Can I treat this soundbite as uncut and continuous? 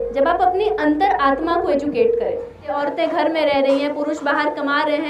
no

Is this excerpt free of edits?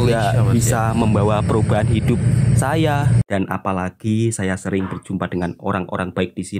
no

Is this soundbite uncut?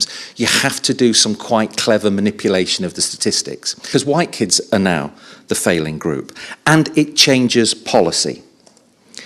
no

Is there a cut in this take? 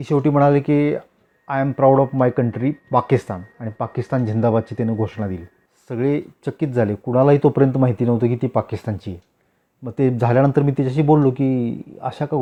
no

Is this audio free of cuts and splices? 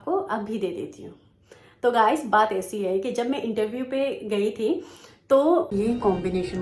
no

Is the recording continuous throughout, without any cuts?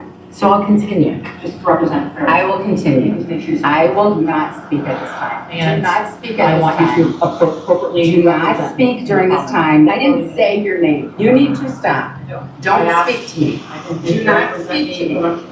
yes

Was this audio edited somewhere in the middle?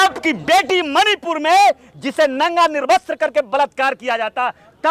no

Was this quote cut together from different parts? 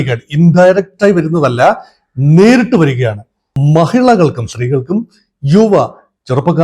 yes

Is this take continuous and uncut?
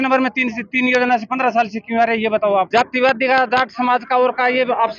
yes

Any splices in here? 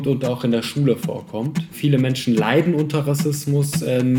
yes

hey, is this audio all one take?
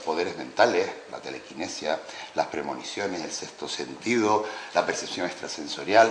no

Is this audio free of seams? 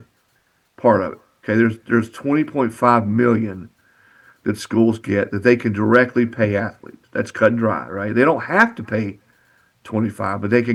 yes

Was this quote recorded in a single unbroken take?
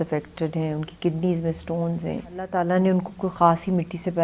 no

